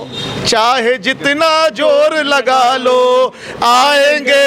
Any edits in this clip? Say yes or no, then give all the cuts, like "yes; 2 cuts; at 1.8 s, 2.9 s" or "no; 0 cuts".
no; 0 cuts